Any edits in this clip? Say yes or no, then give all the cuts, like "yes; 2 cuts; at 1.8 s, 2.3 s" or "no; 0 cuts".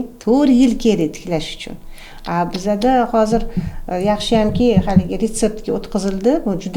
no; 0 cuts